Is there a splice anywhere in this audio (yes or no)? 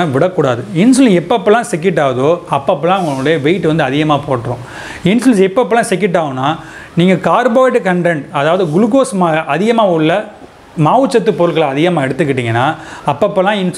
no